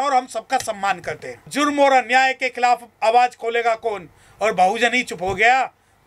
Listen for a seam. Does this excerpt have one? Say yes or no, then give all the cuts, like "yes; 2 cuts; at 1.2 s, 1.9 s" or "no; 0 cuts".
yes; 1 cut; at 1.5 s